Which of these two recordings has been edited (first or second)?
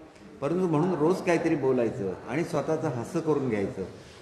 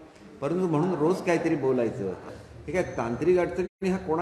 second